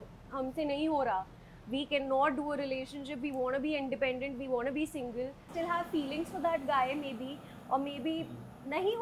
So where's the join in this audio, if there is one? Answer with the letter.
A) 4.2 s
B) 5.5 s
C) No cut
B